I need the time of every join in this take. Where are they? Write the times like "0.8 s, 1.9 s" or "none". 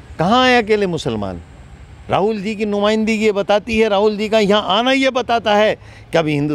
none